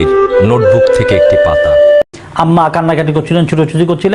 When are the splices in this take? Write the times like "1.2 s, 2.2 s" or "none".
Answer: 2.0 s